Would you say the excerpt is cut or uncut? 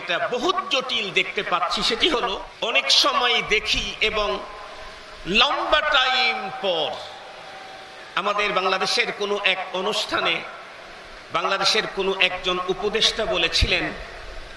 cut